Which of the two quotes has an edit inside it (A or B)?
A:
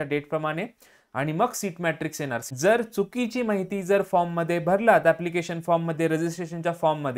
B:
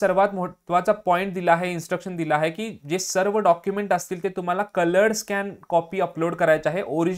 A